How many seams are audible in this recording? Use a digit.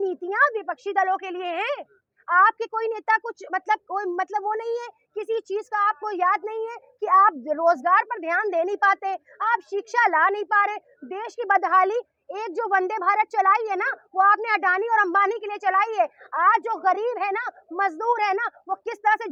0